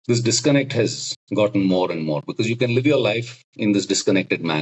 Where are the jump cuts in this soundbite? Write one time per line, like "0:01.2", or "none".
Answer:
none